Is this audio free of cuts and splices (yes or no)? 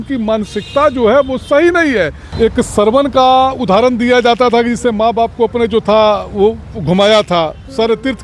no